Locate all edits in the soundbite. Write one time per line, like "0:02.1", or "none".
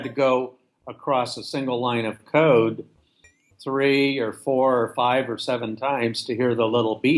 none